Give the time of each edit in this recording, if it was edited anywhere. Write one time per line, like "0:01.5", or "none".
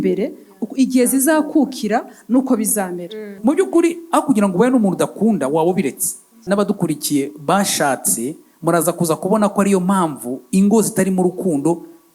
0:03.4
0:06.4